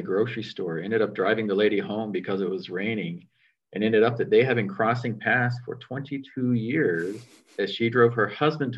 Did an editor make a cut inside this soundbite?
no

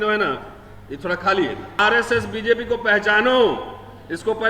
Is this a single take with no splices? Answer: no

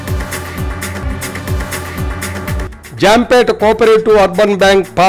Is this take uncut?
no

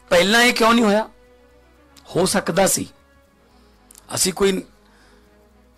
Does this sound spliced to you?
yes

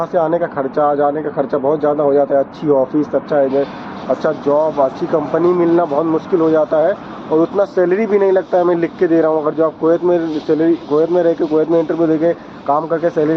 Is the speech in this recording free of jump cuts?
yes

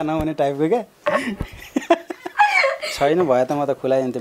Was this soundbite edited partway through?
yes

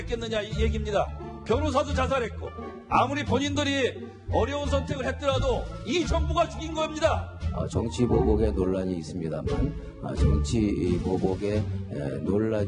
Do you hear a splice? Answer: yes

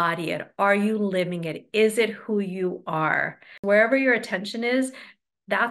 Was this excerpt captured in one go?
no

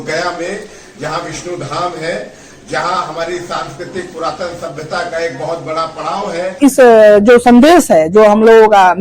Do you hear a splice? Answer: yes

